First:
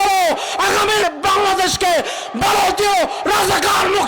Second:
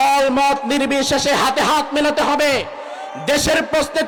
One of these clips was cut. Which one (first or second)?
first